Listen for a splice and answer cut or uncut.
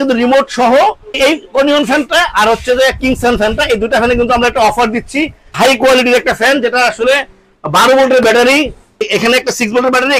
cut